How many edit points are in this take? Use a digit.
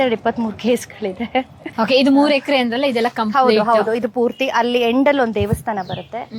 1